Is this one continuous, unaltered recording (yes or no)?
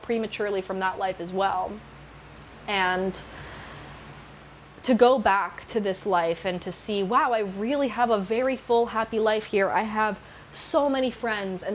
yes